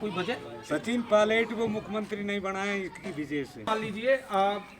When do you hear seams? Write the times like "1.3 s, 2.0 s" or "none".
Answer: 3.7 s